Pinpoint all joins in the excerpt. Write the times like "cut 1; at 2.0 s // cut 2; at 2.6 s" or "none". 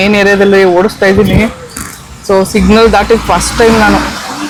none